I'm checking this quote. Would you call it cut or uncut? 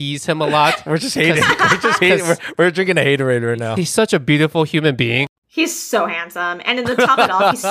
cut